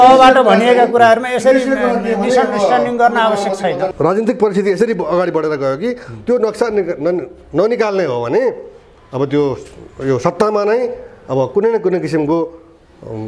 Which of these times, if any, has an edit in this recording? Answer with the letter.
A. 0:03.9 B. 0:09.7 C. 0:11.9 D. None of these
A